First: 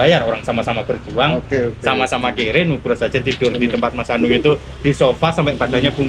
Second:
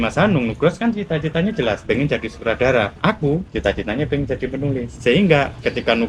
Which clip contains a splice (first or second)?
second